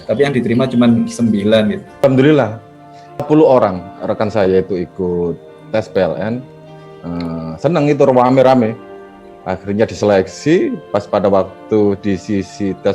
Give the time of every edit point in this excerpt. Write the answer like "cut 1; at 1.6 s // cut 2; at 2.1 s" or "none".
cut 1; at 2.0 s // cut 2; at 3.2 s